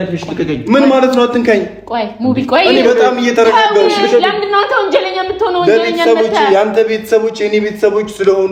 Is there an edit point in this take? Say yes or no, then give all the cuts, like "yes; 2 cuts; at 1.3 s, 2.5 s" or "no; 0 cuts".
no; 0 cuts